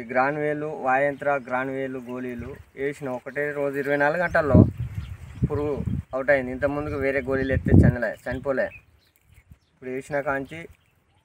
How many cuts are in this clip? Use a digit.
0